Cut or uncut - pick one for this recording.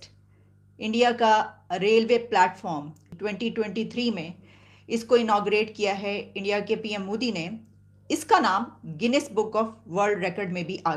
cut